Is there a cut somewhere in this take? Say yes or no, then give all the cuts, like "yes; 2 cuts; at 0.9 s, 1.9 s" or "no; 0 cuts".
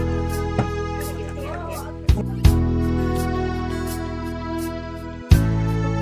no; 0 cuts